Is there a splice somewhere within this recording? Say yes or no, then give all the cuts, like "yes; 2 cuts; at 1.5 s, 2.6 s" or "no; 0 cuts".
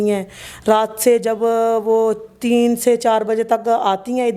no; 0 cuts